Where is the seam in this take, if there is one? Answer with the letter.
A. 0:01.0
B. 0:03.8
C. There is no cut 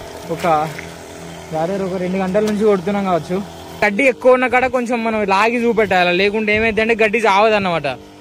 B